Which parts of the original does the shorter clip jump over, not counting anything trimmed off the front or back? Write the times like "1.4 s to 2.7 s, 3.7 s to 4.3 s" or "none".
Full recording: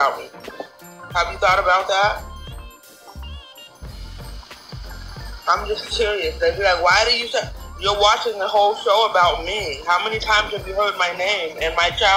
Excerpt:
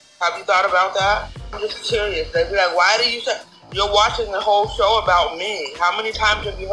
2.5 s to 5.6 s